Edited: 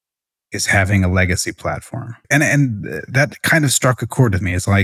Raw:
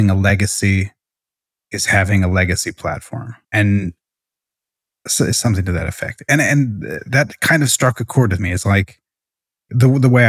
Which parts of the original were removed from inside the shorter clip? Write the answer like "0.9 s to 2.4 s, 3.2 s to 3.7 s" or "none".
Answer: 3.3 s to 6.1 s